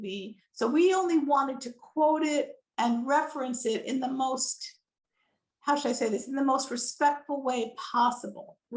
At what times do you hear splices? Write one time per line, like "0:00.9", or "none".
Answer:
none